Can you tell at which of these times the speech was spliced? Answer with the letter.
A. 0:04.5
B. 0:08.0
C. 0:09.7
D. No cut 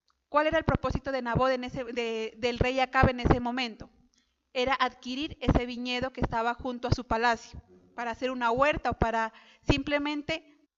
D